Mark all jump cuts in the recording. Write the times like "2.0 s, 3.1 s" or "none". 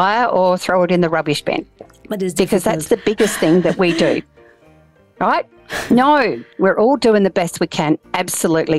none